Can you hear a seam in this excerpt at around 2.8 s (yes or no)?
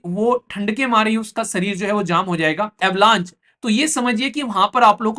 yes